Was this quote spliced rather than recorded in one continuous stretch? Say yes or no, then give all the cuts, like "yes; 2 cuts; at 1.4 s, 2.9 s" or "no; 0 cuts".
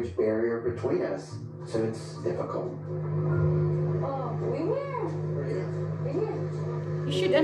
no; 0 cuts